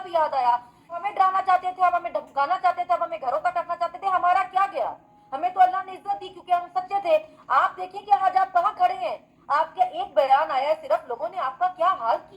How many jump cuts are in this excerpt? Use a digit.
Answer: 1